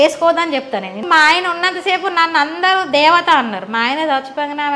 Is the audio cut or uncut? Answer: cut